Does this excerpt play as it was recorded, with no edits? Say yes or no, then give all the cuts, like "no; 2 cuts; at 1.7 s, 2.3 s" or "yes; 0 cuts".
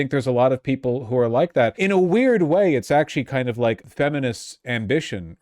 no; 2 cuts; at 1.8 s, 3.8 s